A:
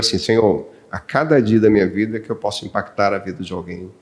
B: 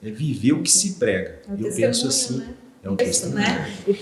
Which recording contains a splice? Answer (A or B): B